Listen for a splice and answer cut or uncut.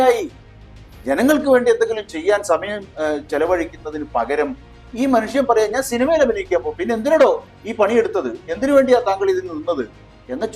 uncut